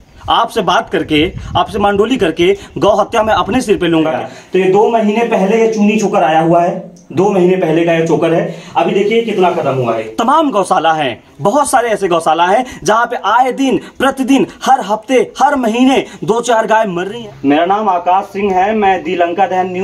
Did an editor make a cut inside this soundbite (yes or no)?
yes